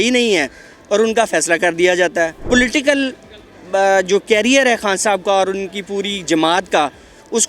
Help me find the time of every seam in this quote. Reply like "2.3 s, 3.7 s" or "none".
2.4 s